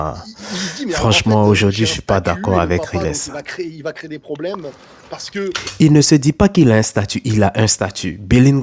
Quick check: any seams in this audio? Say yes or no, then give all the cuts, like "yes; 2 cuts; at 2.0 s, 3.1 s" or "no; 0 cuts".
no; 0 cuts